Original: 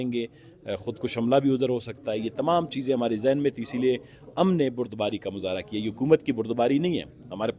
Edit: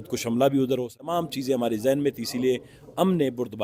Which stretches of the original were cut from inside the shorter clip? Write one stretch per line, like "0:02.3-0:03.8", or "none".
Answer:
0:01.9-0:02.4